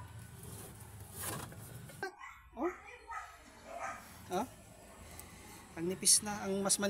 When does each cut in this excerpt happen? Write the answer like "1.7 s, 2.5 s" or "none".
2.2 s

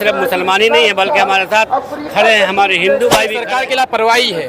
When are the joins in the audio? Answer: 3.4 s

